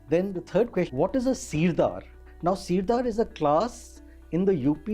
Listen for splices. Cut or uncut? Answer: cut